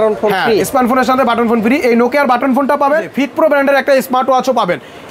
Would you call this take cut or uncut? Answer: cut